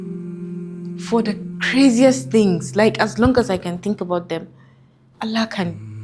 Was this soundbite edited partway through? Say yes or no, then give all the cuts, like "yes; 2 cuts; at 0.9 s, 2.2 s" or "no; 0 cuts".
yes; 1 cut; at 1.1 s